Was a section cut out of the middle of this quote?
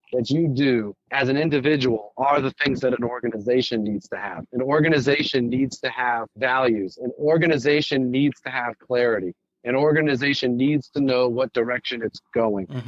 yes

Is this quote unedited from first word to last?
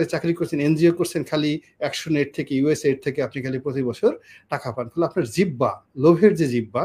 yes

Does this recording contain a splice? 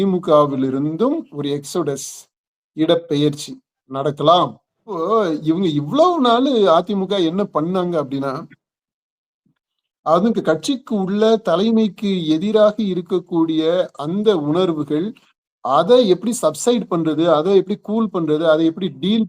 yes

